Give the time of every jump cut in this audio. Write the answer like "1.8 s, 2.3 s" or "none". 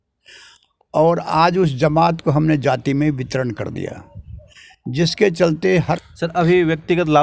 6.0 s